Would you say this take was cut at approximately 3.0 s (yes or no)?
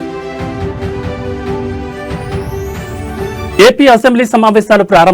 no